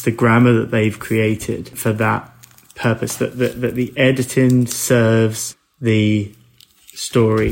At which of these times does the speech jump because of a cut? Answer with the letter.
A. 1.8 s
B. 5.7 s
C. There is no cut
A